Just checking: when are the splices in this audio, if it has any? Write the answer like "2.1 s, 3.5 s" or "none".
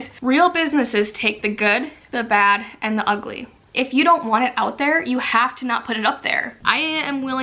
3.6 s, 6.5 s